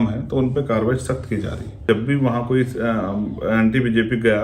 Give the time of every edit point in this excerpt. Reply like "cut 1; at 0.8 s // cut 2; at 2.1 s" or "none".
cut 1; at 1.8 s